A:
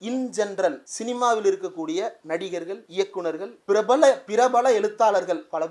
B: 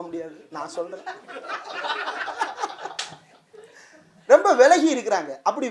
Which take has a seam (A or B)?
A